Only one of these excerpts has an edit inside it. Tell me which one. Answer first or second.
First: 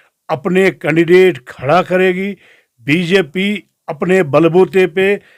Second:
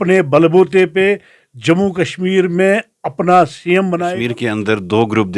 second